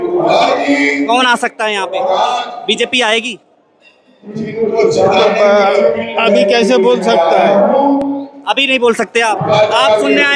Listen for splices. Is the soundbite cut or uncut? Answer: uncut